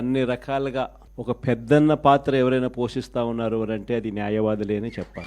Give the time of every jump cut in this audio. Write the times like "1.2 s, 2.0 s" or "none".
1.1 s